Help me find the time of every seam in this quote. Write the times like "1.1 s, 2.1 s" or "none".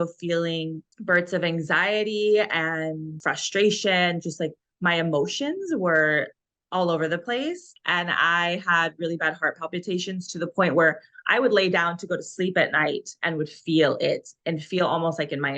3.2 s, 7.7 s